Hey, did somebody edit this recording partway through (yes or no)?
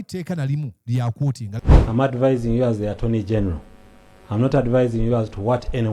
yes